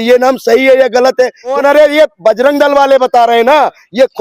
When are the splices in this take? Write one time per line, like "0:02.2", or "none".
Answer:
0:01.6